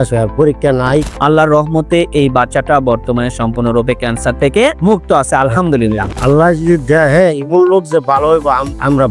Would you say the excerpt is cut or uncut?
cut